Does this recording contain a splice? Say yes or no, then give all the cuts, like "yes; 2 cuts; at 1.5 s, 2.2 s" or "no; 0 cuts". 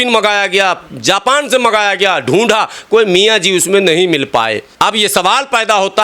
yes; 1 cut; at 4.6 s